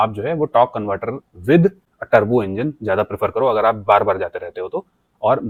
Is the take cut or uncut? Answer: uncut